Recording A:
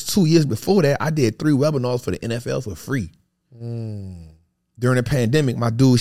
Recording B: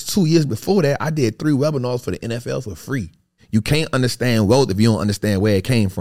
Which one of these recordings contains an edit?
B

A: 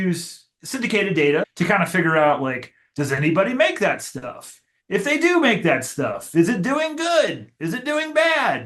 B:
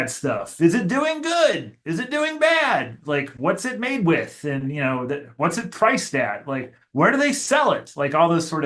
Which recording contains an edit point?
A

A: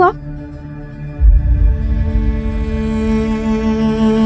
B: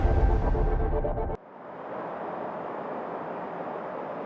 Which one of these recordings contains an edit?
B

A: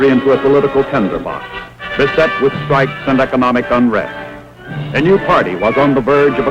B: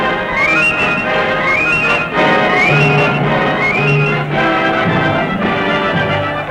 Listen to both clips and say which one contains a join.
B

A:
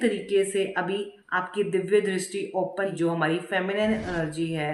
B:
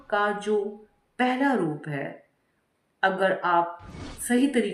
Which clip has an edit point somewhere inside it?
A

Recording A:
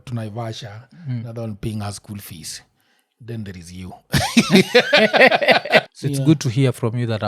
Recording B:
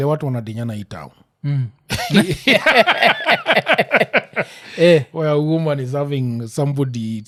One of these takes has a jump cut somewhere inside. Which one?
A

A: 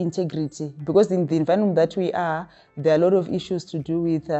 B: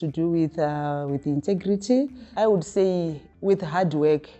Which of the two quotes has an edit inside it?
B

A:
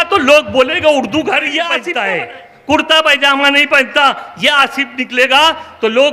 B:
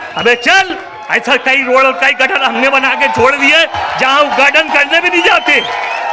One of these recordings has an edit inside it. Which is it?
A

